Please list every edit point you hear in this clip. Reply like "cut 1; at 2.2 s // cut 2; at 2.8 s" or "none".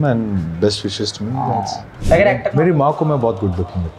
cut 1; at 1.9 s